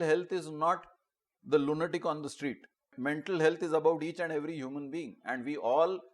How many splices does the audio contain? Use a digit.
1